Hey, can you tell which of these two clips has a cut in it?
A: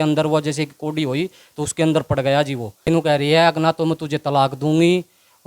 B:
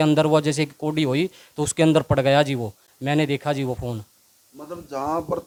A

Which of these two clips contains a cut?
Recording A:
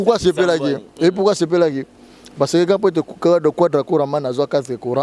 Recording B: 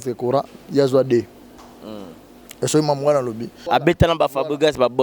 B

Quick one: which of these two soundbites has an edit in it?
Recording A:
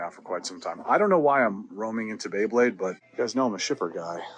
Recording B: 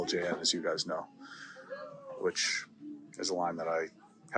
A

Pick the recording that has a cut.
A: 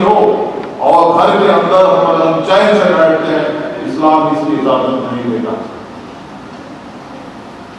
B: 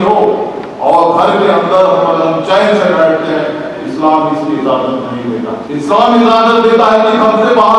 B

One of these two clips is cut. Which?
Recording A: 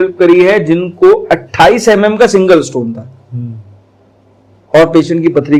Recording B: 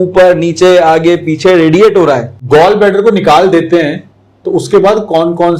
B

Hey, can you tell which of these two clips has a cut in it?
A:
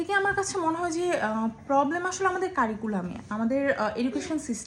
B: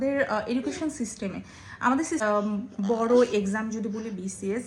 B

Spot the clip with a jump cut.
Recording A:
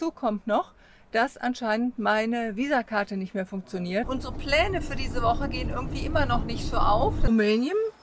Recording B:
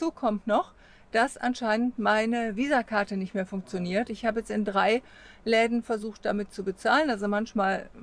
A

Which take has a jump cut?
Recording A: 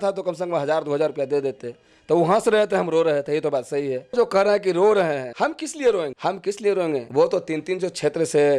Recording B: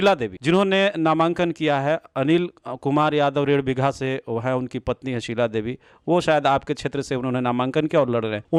A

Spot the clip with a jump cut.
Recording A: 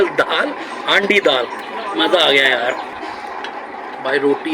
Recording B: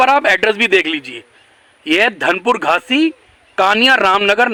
A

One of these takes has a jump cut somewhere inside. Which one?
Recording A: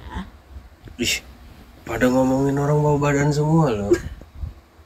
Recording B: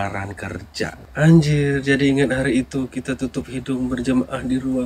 B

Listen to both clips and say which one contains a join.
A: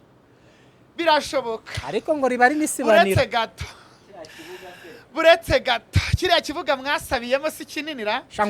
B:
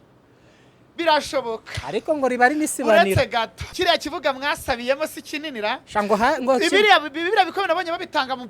B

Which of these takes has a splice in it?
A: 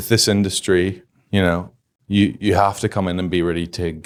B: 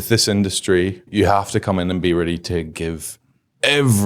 B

